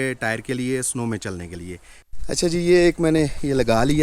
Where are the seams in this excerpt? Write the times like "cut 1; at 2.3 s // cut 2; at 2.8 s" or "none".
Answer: cut 1; at 1.9 s